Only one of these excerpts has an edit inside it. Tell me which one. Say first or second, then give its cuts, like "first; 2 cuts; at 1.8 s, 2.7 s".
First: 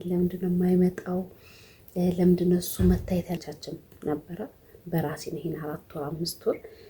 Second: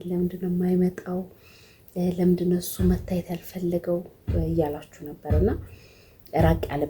first; 1 cut; at 3.5 s